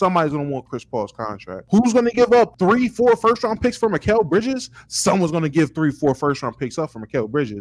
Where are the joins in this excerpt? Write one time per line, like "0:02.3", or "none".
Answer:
0:01.5
0:02.5